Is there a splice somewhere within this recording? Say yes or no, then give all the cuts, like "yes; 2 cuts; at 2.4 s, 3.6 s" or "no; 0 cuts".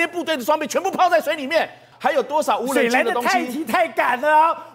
yes; 1 cut; at 1.9 s